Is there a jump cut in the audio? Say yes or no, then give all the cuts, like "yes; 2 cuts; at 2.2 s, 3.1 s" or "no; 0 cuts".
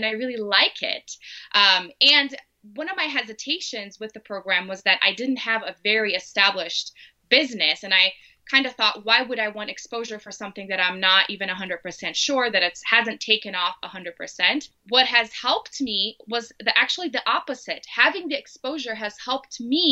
yes; 1 cut; at 14.8 s